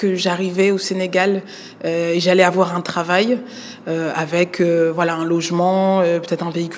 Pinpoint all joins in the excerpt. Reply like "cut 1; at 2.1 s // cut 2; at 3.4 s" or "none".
none